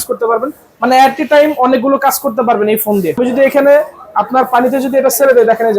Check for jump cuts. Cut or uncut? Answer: cut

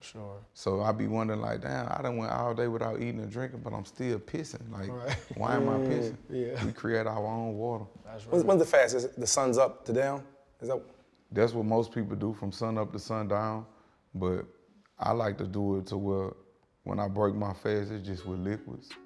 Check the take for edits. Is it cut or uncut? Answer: uncut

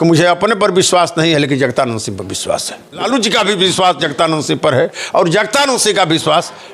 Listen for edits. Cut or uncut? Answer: cut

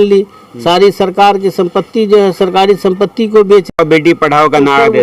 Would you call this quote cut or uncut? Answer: cut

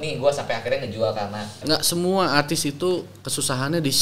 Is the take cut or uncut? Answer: cut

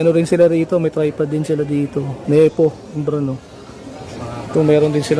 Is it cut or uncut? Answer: cut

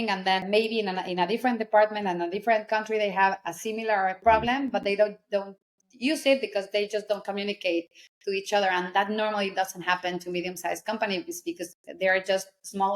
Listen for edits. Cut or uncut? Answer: uncut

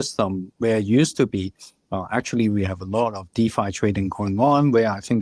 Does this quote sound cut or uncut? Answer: uncut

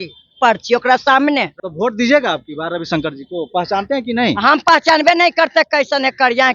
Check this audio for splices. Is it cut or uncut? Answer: cut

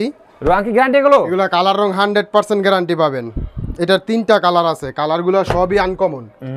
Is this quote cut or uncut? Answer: uncut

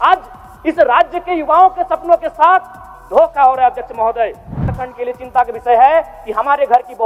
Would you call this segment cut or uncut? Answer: cut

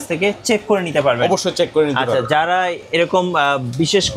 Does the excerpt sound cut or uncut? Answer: uncut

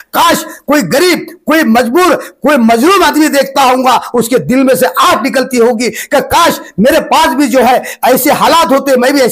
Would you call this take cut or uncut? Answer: uncut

